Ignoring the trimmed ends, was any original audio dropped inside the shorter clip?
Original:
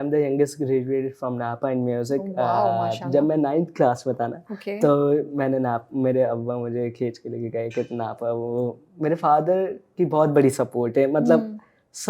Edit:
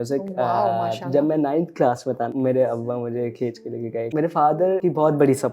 yes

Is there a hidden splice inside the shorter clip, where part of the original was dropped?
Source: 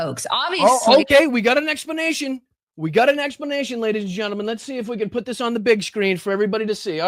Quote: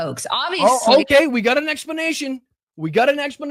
no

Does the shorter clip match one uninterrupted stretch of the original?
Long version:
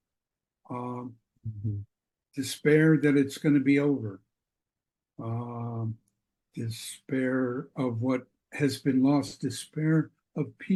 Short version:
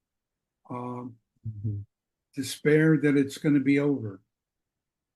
yes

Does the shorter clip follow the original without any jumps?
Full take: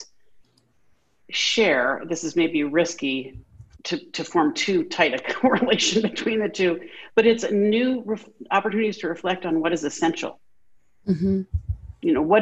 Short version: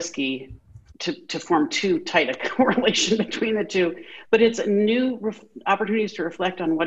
yes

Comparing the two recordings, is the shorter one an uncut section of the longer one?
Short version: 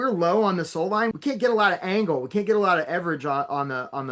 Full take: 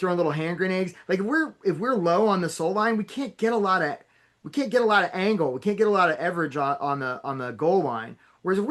no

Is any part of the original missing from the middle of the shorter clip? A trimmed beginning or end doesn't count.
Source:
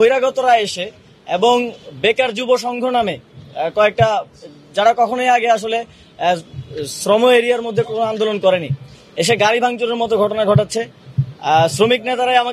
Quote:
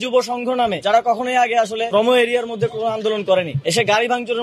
yes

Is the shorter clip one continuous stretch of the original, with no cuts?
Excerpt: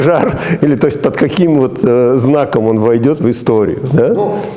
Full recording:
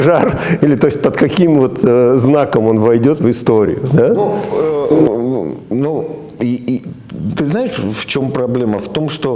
yes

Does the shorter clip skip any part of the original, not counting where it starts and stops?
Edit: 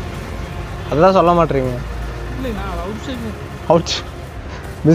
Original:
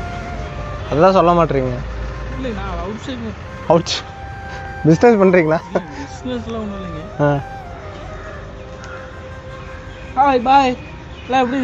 no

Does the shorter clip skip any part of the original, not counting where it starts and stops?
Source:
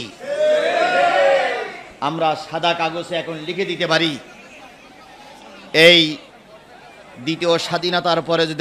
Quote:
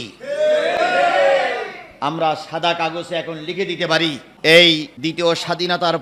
yes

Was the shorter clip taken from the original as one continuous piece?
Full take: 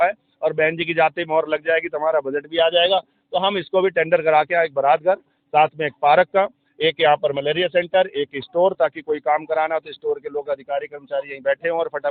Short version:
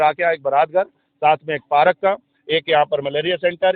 yes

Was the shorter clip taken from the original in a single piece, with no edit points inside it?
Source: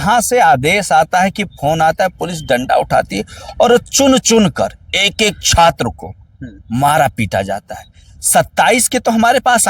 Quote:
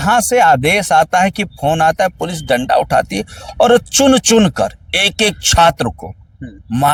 yes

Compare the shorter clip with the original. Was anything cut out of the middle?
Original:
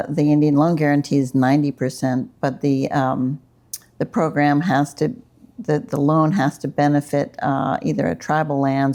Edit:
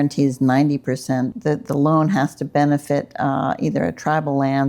yes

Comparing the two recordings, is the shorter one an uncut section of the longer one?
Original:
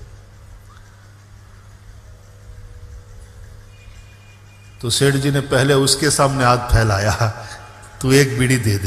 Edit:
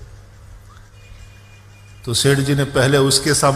no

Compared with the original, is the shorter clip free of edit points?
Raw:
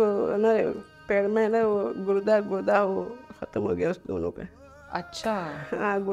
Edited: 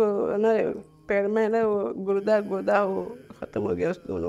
yes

